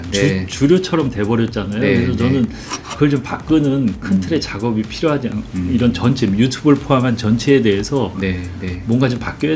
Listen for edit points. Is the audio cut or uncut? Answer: uncut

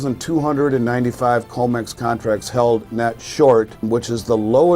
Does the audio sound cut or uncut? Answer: cut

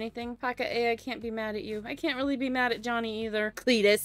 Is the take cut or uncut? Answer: uncut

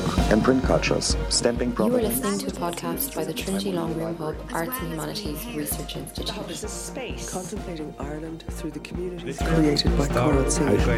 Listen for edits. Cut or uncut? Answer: uncut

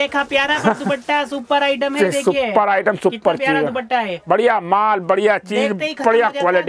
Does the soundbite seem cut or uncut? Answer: uncut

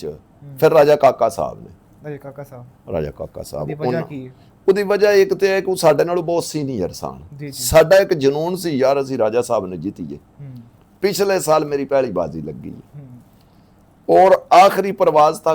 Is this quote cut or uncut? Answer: uncut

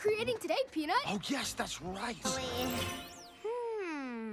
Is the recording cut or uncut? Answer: cut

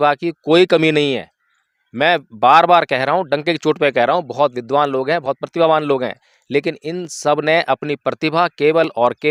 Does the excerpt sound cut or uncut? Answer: uncut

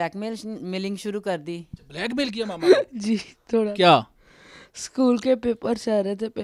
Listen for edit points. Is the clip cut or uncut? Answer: uncut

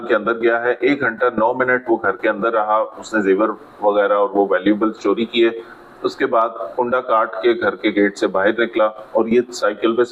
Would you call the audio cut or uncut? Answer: uncut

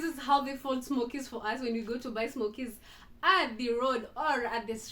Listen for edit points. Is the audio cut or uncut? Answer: uncut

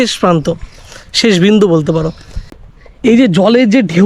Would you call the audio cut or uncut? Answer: cut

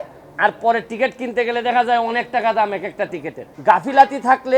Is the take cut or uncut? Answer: cut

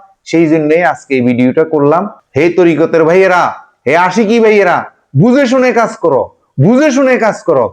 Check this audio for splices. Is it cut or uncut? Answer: cut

